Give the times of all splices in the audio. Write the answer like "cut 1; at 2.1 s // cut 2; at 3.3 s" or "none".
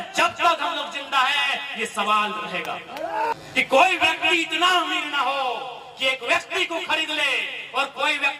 cut 1; at 3.3 s